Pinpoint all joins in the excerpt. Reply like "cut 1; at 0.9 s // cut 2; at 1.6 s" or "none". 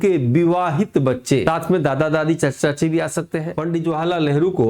cut 1; at 1.4 s // cut 2; at 3.5 s